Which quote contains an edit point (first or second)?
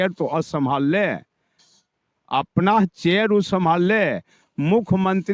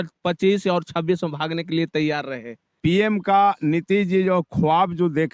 second